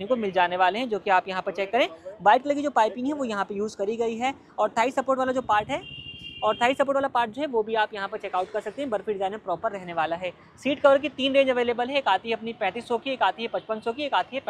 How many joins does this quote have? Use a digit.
0